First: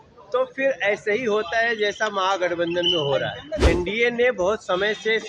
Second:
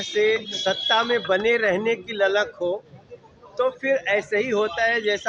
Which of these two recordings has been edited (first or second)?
first